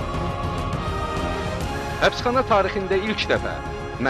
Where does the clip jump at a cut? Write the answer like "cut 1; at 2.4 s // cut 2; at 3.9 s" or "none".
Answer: none